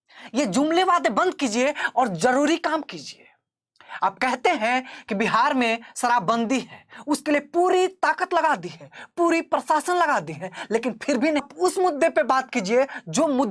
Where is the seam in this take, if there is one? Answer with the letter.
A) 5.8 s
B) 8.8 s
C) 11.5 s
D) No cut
C